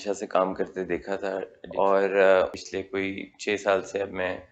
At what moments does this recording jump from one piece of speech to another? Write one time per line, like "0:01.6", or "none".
0:01.6
0:02.6